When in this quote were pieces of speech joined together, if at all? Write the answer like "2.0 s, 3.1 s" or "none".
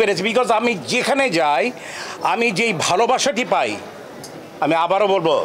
none

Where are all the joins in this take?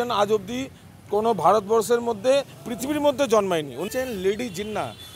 3.9 s

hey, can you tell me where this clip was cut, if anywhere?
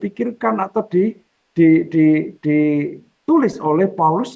none

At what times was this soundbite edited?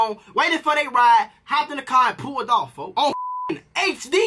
1.4 s

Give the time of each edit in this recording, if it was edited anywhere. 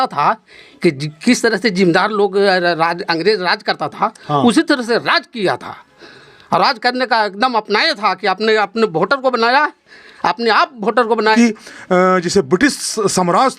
11.3 s

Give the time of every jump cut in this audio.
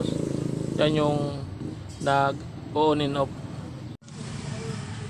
4.0 s

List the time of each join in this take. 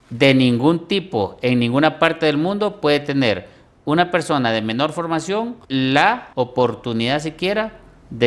5.6 s, 6.2 s

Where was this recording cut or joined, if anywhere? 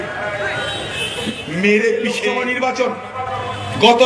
2.2 s

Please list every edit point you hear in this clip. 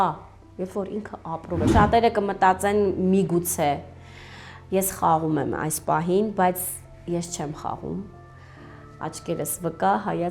1.7 s

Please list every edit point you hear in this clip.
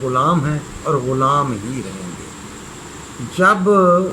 3.1 s

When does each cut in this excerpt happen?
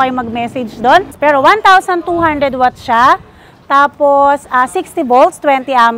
1.1 s

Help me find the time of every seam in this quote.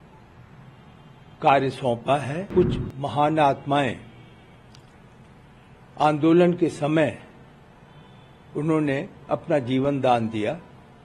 2.5 s

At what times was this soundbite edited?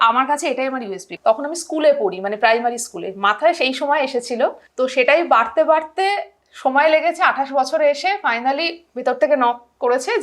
1.1 s, 4.6 s

